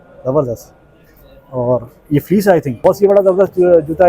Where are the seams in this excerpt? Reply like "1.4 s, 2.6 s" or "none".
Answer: 2.7 s